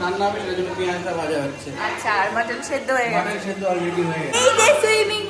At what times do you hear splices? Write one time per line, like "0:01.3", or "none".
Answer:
0:04.3

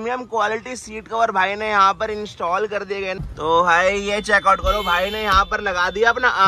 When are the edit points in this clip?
0:03.2

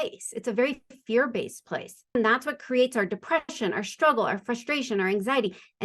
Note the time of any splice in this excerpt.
0:02.1

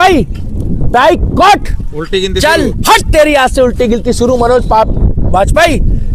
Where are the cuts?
none

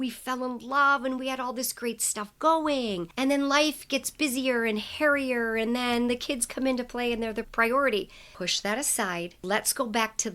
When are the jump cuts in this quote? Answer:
0:03.1
0:08.2
0:09.4

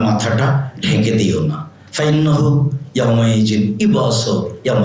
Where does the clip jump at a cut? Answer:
none

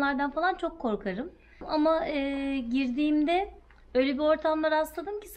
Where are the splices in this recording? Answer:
0:01.6

